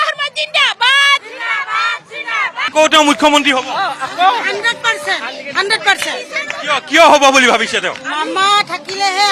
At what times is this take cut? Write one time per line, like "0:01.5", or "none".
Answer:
0:02.7